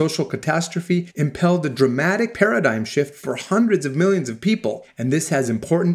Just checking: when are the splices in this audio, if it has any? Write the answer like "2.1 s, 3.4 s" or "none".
1.1 s, 2.3 s, 4.9 s